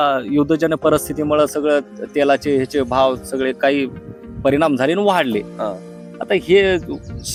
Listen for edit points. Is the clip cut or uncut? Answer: uncut